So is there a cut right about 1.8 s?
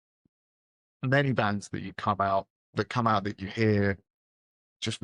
no; 0 cuts

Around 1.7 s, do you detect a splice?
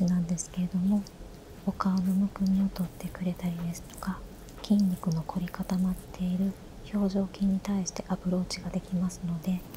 no; 0 cuts

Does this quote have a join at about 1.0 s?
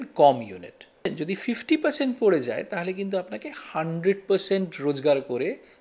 yes; 1 cut; at 1.0 s

